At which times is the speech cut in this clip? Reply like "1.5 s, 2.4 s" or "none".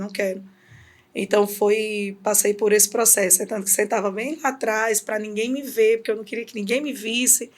none

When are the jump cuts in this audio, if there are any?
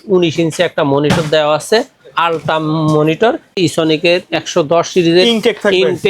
3.6 s

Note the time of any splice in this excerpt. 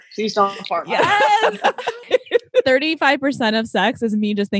2.0 s

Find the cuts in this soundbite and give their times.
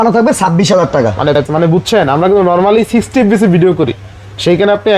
1.4 s

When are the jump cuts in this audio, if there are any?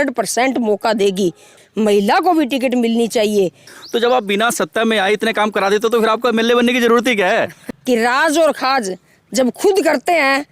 1.5 s, 3.7 s, 7.7 s

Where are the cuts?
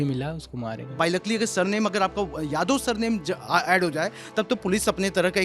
0.9 s

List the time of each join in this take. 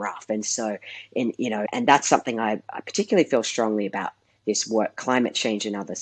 1.7 s

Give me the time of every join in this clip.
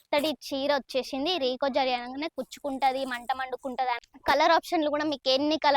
4.1 s

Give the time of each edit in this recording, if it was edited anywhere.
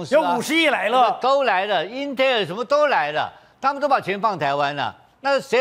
none

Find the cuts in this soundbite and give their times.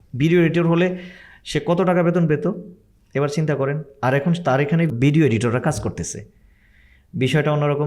4.9 s

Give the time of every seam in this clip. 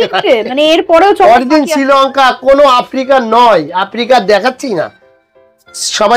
none

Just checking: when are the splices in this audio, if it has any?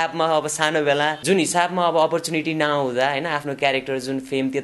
1.2 s

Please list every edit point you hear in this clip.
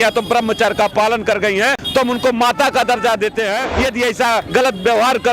1.8 s, 4.2 s

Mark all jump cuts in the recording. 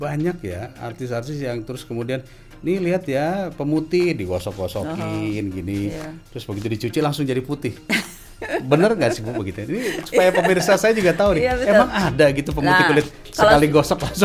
none

